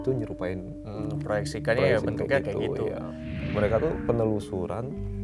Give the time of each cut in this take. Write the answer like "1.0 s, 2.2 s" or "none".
3.3 s